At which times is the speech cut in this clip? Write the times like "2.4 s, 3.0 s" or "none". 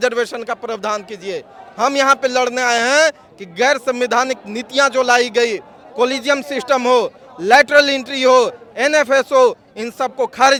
none